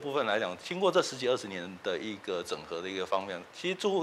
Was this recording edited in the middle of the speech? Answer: no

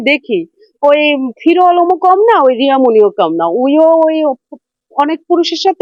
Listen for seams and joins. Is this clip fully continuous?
yes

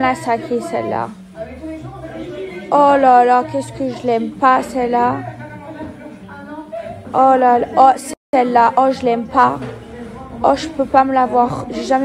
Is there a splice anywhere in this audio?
no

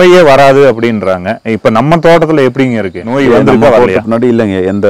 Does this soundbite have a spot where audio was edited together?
no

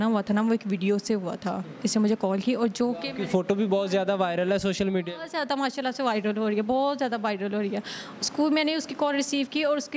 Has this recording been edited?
no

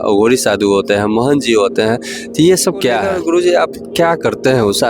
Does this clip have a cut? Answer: yes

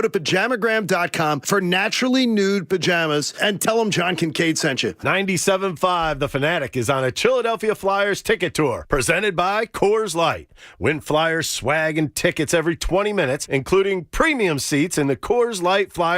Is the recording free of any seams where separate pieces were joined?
no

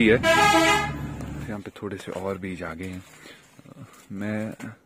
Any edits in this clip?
yes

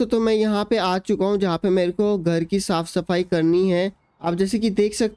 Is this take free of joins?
yes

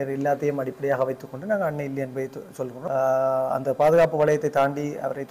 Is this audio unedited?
no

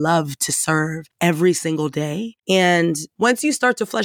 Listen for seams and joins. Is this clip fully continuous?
no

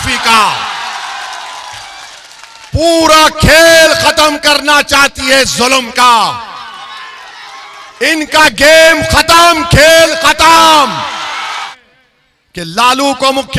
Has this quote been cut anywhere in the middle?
yes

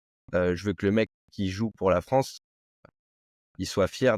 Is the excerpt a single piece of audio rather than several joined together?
no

